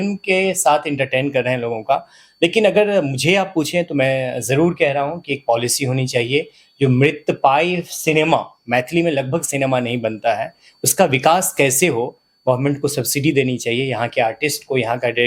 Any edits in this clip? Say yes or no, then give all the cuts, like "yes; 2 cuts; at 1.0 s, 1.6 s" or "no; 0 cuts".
no; 0 cuts